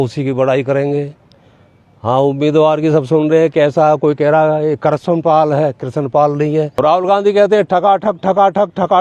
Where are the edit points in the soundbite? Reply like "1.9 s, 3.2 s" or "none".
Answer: 6.7 s